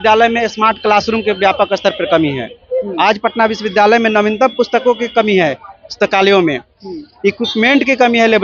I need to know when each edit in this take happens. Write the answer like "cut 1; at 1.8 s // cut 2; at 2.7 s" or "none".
none